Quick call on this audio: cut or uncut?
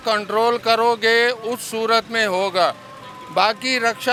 uncut